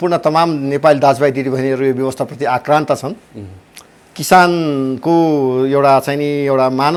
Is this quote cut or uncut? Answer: uncut